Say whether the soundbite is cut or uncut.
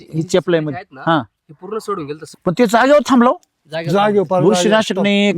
cut